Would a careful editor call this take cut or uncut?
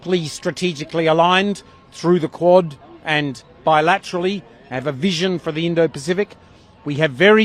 uncut